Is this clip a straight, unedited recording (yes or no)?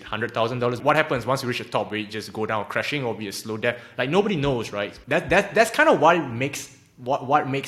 no